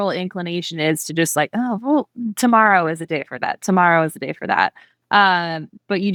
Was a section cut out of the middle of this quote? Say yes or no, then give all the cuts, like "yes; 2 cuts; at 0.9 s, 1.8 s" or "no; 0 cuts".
no; 0 cuts